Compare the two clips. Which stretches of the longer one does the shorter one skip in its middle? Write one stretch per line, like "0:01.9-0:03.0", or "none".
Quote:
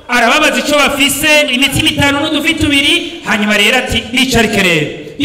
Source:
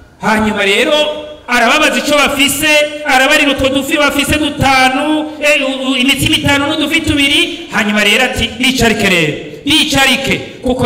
0:02.9-0:06.0